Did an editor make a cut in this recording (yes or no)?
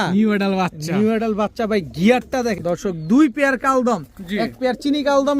yes